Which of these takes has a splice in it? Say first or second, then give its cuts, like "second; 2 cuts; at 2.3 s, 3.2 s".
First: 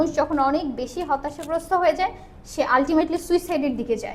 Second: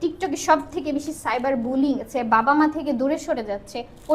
second; 1 cut; at 2.1 s